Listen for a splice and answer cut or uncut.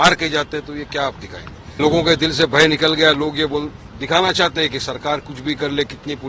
cut